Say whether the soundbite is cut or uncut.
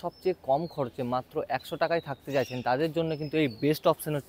uncut